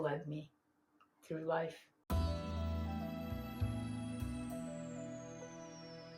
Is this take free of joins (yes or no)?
no